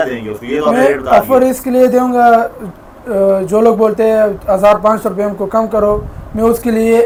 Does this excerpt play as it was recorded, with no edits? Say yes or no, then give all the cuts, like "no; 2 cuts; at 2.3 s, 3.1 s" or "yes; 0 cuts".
yes; 0 cuts